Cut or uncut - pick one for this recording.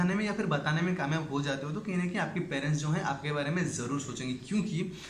uncut